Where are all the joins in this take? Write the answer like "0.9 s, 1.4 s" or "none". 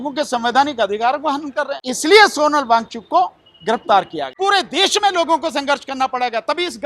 1.8 s, 4.3 s